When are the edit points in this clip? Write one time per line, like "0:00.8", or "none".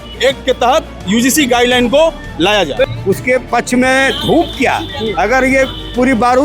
0:02.8